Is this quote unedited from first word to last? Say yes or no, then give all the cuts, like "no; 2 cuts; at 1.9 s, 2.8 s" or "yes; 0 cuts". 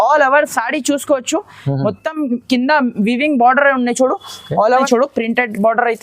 no; 1 cut; at 4.8 s